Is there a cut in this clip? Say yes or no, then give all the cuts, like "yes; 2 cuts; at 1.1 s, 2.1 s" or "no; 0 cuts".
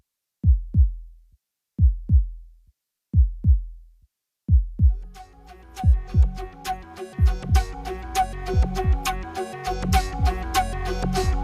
no; 0 cuts